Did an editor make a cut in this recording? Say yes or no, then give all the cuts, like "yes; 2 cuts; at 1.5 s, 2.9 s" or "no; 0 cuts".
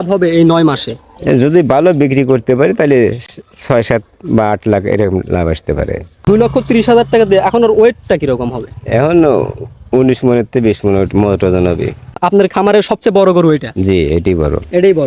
yes; 2 cuts; at 6.2 s, 12.1 s